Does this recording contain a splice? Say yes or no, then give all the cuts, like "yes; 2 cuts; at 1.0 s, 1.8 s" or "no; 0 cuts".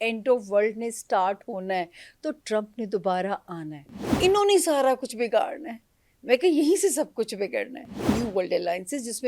yes; 2 cuts; at 4.0 s, 8.0 s